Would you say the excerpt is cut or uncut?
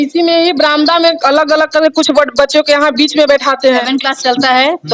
cut